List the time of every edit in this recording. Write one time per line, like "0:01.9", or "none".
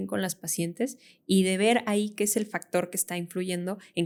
none